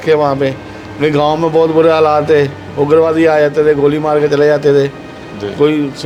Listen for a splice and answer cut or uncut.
uncut